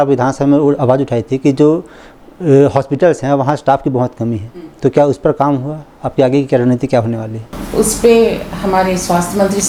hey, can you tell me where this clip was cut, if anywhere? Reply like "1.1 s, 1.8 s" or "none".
none

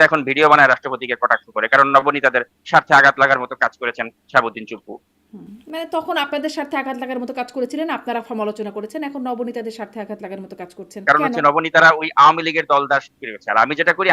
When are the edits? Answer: 11.0 s

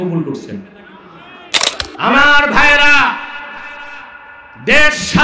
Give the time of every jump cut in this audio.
1.8 s

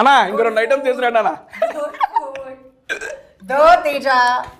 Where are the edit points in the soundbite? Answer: none

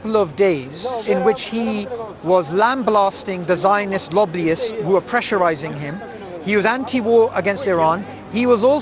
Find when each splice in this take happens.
1.0 s

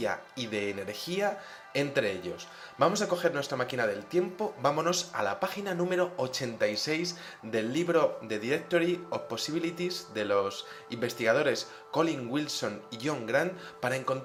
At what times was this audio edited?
none

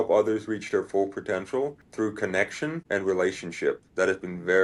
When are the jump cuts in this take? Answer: 1.8 s

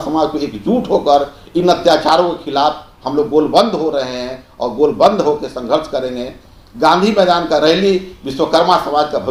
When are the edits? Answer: none

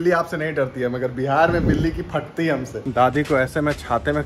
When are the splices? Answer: 2.8 s

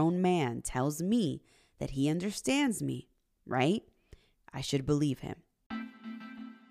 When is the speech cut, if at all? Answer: 5.5 s

